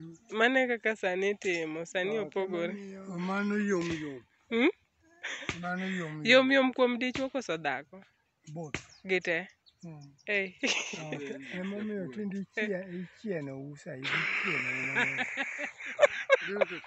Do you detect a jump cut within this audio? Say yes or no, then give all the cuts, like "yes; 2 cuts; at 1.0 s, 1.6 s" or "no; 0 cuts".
yes; 1 cut; at 11.4 s